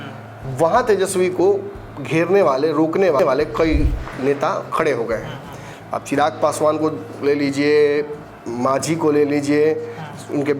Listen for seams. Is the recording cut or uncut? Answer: cut